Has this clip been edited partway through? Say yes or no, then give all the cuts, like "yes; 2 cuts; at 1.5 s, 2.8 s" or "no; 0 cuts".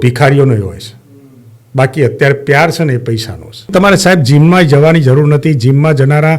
yes; 1 cut; at 3.7 s